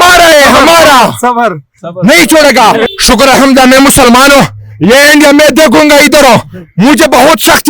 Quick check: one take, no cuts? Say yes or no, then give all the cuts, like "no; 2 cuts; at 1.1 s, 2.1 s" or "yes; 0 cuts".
no; 1 cut; at 2.9 s